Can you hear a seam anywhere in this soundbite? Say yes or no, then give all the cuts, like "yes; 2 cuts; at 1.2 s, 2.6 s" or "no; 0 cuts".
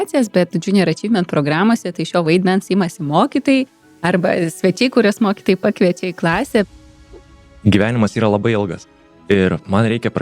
yes; 1 cut; at 7.3 s